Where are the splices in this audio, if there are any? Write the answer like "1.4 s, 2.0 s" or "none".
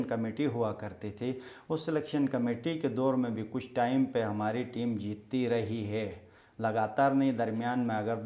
none